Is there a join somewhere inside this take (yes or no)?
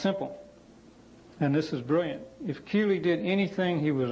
no